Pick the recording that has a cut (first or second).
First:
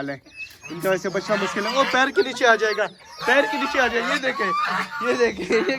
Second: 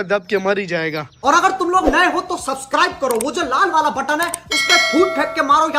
second